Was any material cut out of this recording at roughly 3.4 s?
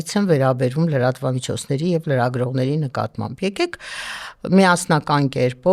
no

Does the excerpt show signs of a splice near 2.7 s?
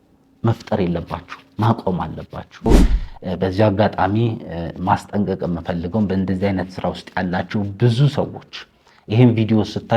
yes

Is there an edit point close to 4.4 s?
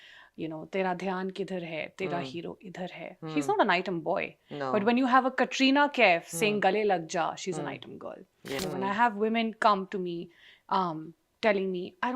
no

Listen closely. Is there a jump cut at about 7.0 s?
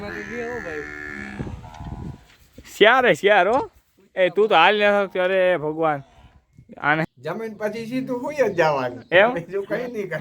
yes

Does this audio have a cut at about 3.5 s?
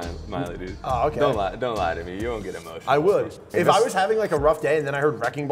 yes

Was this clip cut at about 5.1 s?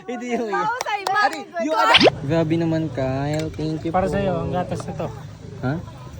no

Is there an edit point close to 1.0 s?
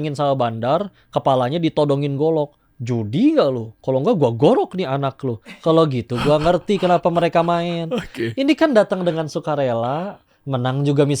no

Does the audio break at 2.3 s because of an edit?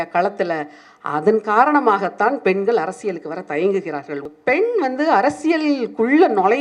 no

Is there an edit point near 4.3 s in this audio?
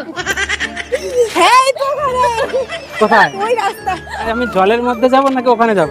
yes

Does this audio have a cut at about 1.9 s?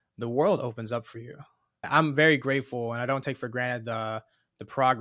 yes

